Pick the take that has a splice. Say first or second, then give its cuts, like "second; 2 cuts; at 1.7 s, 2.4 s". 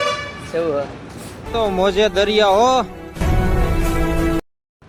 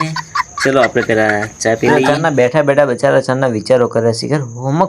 second; 1 cut; at 2.0 s